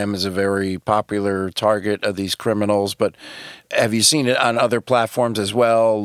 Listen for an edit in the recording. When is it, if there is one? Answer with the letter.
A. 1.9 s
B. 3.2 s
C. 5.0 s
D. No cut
D